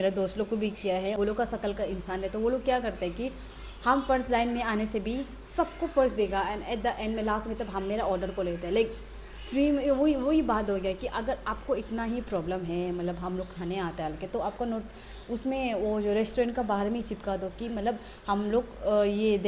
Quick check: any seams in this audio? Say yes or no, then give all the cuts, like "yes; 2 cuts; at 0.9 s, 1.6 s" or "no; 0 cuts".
yes; 1 cut; at 1.2 s